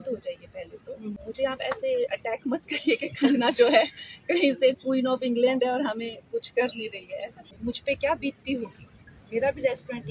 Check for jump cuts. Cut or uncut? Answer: cut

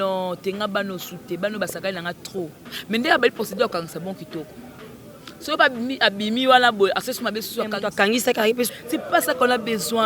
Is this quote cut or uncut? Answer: cut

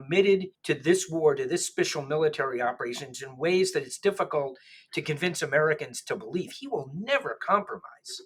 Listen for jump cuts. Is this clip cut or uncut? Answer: uncut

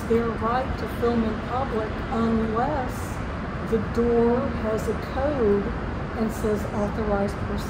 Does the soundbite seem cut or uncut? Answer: uncut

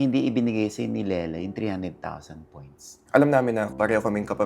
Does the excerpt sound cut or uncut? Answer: cut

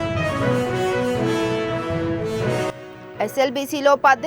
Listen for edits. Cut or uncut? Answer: cut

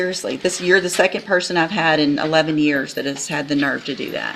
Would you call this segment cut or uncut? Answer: uncut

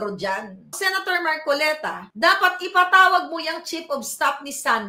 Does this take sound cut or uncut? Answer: uncut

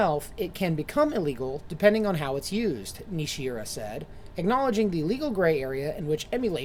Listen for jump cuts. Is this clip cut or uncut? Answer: uncut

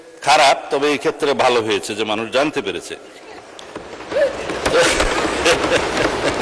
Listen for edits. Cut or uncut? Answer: uncut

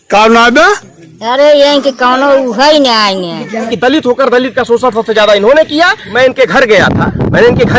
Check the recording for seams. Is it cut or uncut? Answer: cut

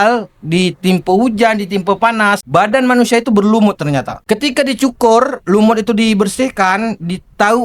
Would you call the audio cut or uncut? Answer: cut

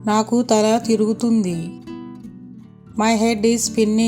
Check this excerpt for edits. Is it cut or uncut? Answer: uncut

